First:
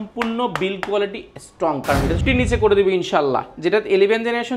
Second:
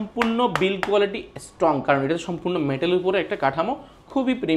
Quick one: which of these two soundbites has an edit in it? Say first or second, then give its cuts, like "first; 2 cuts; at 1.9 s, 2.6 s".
first; 1 cut; at 2.2 s